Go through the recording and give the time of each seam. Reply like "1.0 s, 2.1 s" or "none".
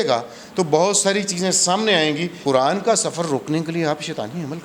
2.3 s

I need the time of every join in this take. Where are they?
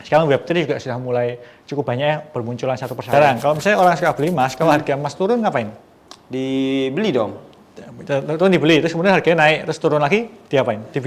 3.1 s

